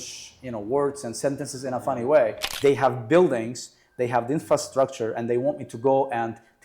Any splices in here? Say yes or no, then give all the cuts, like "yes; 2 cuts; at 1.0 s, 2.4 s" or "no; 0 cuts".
yes; 1 cut; at 2.4 s